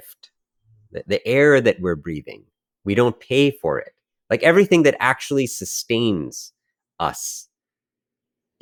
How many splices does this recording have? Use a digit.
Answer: 0